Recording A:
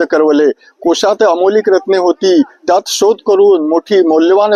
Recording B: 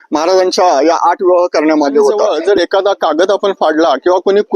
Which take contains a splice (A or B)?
B